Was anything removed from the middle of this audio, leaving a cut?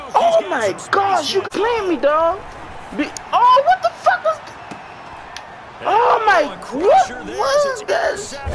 yes; 1 cut; at 1.5 s

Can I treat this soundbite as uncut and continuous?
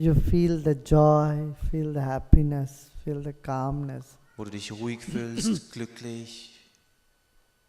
no; 1 cut; at 2.6 s

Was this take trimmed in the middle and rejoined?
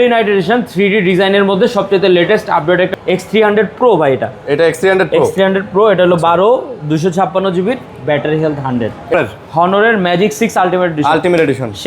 yes; 2 cuts; at 2.9 s, 9.1 s

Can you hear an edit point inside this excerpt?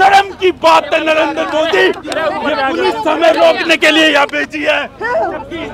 no; 0 cuts

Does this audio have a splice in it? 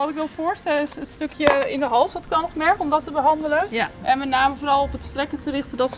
no; 0 cuts

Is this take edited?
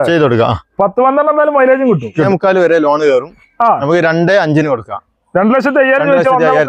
yes; 1 cut; at 2.3 s

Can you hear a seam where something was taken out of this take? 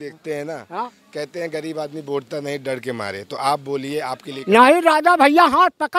no; 0 cuts

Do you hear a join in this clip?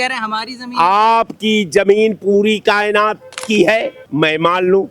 yes; 1 cut; at 4.0 s

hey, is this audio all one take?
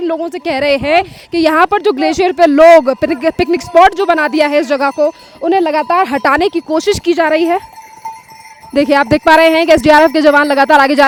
yes; 0 cuts

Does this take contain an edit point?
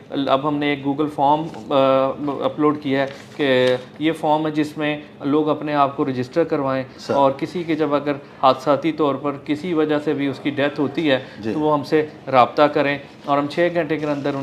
no; 0 cuts

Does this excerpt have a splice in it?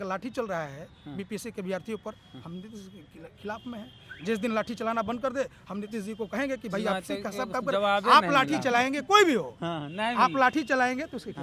no; 0 cuts

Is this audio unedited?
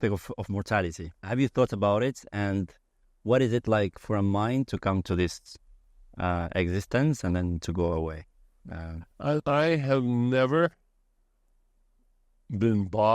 no; 2 cuts; at 1.1 s, 9.4 s

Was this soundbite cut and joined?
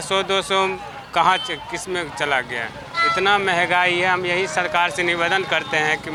no; 0 cuts

